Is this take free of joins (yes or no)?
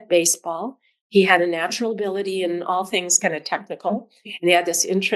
yes